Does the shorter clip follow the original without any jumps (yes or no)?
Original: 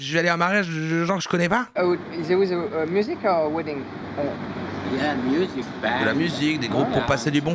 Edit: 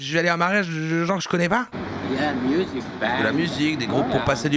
no